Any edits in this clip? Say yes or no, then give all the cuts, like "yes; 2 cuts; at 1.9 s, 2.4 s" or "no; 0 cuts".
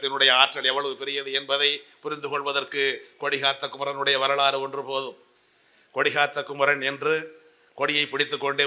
no; 0 cuts